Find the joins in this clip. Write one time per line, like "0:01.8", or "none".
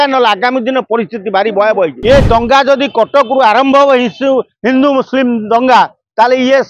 0:02.0

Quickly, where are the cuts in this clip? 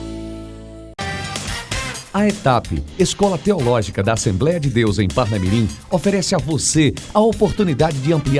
0:00.9

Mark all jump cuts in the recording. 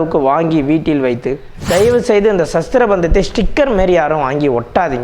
0:01.5

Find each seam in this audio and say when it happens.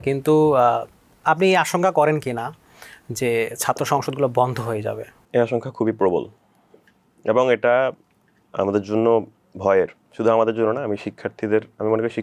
none

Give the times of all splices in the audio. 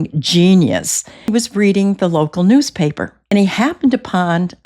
0:01.3
0:03.3

